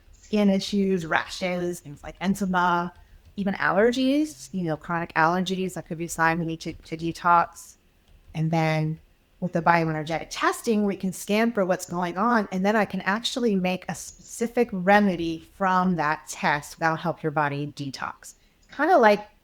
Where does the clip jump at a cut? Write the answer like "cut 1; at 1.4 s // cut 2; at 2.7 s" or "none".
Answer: cut 1; at 3.3 s // cut 2; at 8.3 s // cut 3; at 16.7 s